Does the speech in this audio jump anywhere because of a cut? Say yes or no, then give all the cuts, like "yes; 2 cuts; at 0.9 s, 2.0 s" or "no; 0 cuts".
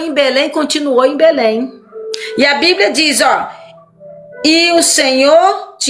no; 0 cuts